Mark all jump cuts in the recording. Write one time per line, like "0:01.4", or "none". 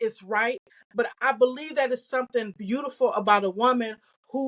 0:01.1